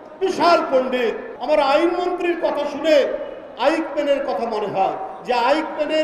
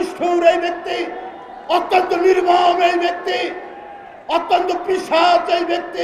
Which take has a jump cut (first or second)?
first